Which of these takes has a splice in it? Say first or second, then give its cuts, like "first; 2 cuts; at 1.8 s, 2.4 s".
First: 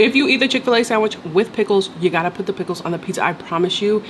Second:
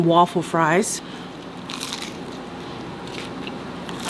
second; 1 cut; at 1.0 s